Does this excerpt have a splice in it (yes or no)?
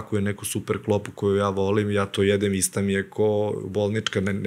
no